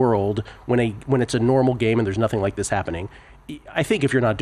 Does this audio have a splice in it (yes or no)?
no